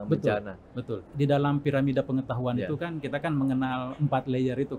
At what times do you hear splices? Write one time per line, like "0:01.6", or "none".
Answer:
0:01.0